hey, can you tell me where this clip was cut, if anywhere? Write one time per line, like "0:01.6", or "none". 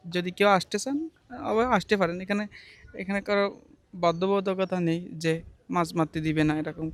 none